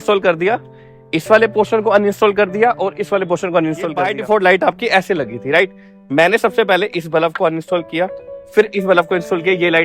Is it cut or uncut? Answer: cut